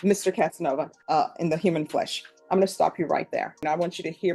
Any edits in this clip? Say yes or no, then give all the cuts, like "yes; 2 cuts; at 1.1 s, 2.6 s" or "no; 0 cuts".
yes; 2 cuts; at 1.0 s, 3.6 s